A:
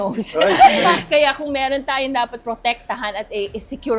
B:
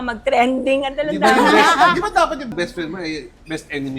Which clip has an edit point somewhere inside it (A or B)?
B